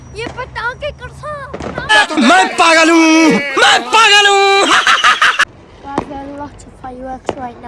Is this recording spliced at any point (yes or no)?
yes